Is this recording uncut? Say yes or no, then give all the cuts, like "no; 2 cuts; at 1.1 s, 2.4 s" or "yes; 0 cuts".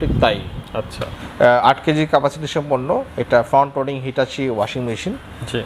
no; 1 cut; at 1.2 s